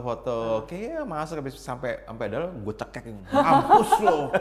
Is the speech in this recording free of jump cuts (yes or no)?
yes